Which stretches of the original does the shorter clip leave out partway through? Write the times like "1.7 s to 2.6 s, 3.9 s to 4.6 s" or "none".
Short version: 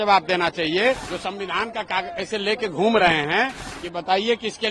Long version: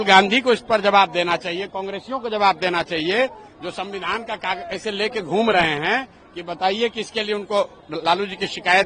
3.4 s to 3.6 s